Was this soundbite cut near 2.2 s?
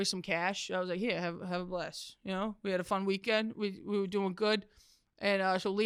no; 0 cuts

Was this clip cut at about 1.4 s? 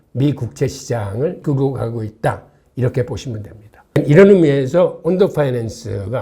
yes; 1 cut; at 1.4 s

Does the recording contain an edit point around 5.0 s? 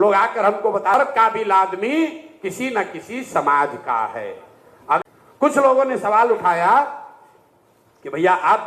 yes; 2 cuts; at 0.9 s, 5.0 s

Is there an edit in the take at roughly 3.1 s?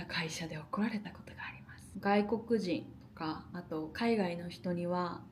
no; 1 cut; at 1.9 s

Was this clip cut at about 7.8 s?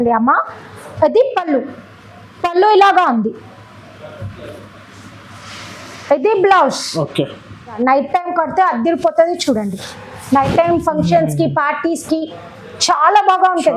yes; 1 cut; at 7.8 s

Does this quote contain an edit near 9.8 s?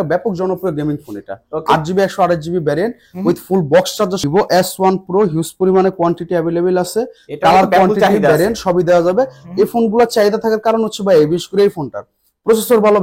no; 1 cut; at 4.2 s

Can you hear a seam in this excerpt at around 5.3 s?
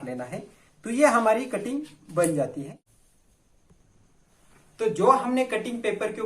no; 1 cut; at 2.7 s

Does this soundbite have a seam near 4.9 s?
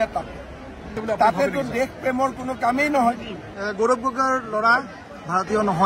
no; 2 cuts; at 1.0 s, 3.3 s

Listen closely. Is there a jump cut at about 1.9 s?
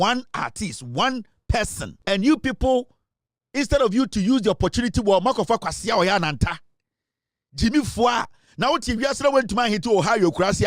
yes; 1 cut; at 1.9 s

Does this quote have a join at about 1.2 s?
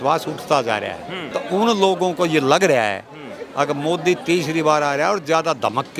yes; 1 cut; at 1.2 s

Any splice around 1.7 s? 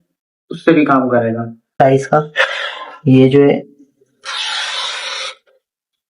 yes; 1 cut; at 1.7 s

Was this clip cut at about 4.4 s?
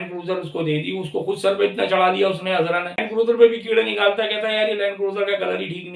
no; 1 cut; at 3.0 s

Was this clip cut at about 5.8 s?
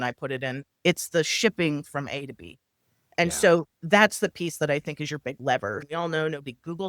yes; 1 cut; at 5.8 s

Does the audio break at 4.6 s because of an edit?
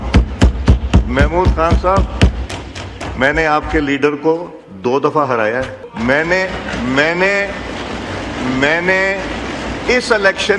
no; 1 cut; at 5.8 s

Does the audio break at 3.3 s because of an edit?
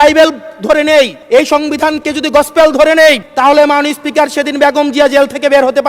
yes; 2 cuts; at 1.2 s, 3.3 s

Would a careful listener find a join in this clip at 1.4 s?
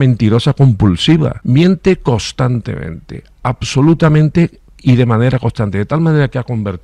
yes; 1 cut; at 1.4 s

